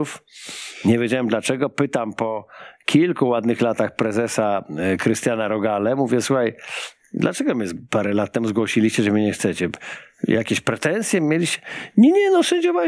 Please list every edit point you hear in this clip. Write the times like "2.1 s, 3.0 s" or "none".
none